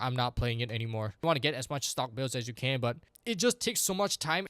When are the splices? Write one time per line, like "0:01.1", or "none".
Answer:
0:01.2